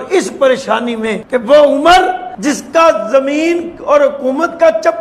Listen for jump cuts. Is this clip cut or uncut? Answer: cut